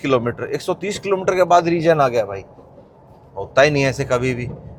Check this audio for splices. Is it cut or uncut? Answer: uncut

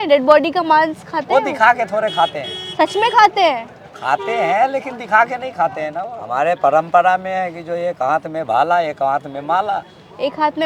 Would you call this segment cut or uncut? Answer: cut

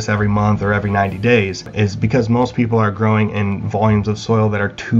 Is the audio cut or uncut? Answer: cut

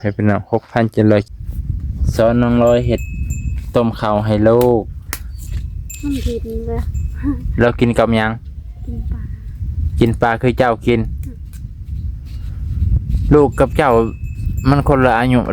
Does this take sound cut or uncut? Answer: cut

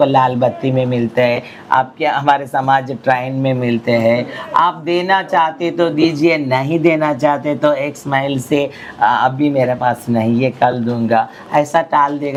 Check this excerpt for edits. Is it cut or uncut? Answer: uncut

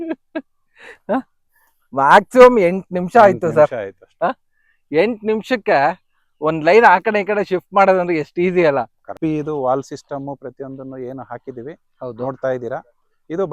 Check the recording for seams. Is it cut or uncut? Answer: cut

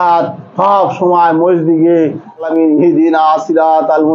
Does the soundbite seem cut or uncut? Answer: cut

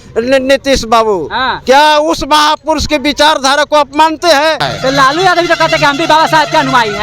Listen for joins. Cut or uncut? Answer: cut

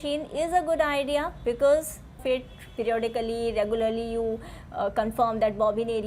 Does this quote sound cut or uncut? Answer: cut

